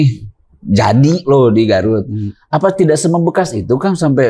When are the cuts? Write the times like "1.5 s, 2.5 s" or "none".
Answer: none